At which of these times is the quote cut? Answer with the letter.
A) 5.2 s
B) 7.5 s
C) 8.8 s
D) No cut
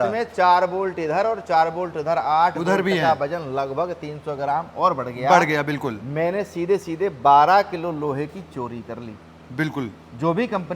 D